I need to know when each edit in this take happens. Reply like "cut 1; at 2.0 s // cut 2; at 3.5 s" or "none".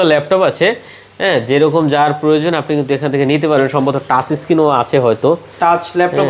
none